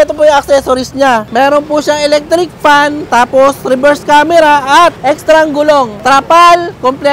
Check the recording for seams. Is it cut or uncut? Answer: cut